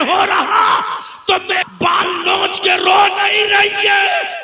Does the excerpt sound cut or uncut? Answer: cut